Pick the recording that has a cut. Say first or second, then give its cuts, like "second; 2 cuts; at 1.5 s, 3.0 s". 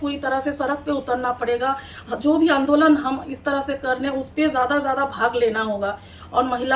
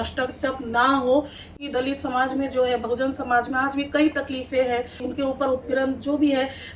second; 2 cuts; at 1.6 s, 5.1 s